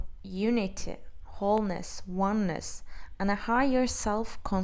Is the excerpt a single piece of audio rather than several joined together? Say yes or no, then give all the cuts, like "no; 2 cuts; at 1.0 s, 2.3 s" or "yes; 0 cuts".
yes; 0 cuts